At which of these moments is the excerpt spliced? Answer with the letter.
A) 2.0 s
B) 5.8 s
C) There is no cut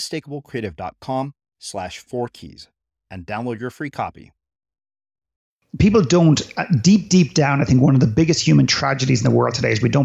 B